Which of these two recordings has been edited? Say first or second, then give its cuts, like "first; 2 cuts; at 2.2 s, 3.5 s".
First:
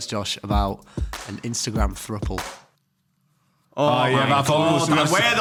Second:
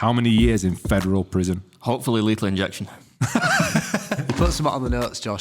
second; 1 cut; at 4.2 s